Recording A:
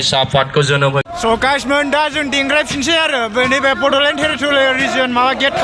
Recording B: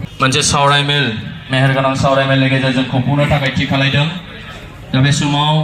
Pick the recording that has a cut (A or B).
A